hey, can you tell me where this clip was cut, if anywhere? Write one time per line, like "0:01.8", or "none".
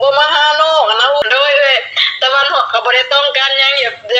0:01.2